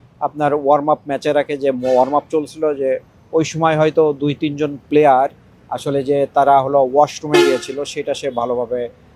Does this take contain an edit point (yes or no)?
no